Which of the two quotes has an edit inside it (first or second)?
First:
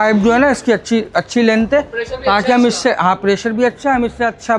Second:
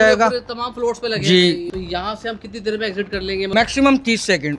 second